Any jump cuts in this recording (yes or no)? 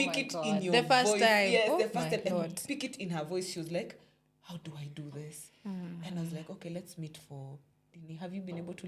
no